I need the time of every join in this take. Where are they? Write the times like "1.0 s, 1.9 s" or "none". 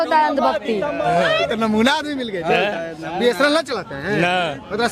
1.1 s